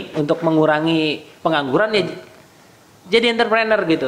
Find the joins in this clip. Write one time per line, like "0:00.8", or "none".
none

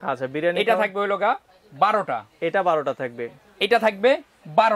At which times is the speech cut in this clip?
none

